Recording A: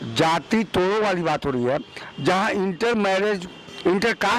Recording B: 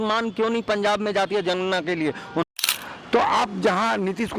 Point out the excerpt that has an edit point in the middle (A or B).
B